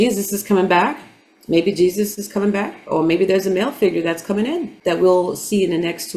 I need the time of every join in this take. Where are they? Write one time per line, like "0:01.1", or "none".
0:04.7